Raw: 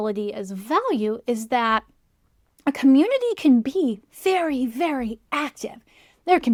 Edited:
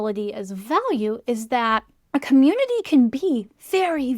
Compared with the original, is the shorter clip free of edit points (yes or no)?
no